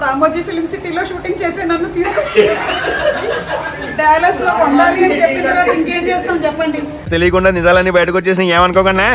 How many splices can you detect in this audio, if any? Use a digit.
0